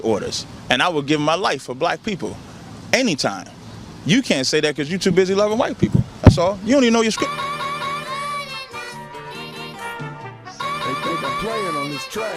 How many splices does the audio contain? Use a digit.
1